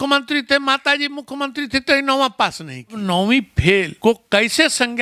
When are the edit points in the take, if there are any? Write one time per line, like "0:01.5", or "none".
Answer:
0:03.0
0:03.9